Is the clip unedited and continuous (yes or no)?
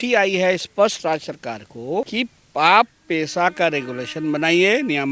no